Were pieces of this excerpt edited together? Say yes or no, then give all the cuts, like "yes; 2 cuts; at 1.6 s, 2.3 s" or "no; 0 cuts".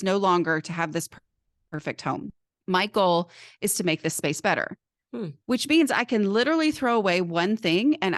no; 0 cuts